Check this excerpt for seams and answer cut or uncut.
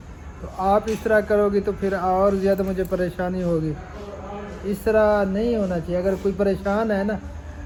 uncut